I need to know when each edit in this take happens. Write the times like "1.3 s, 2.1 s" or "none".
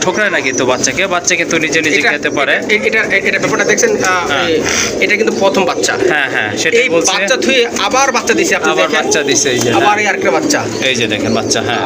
none